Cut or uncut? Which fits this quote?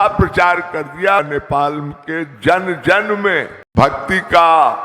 cut